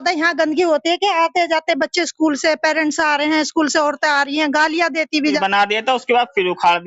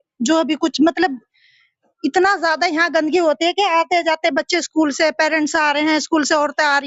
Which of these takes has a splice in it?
first; 1 cut; at 5.3 s

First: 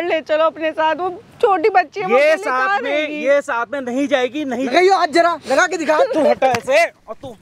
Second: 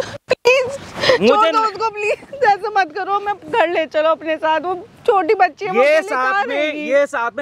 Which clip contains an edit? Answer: first; 1 cut; at 4.7 s

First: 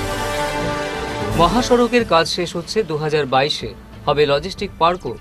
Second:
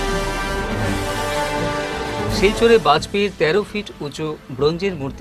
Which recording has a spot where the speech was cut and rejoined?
first; 1 cut; at 1.1 s

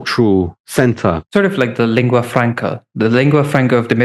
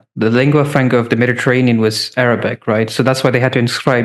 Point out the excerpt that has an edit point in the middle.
first; 1 cut; at 1.2 s

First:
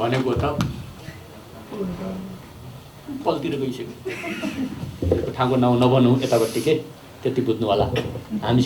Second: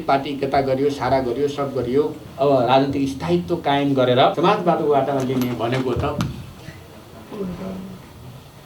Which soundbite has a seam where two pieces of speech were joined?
second; 2 cuts; at 2.2 s, 4.4 s

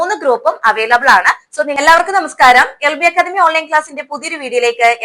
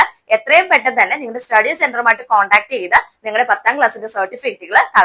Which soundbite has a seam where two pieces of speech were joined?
first; 1 cut; at 1.8 s

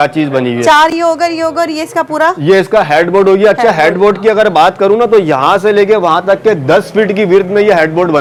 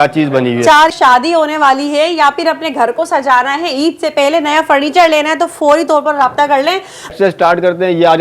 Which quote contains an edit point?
second; 2 cuts; at 0.9 s, 7.1 s

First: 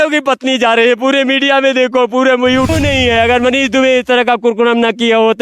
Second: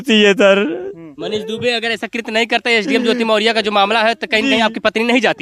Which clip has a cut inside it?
first; 1 cut; at 2.7 s

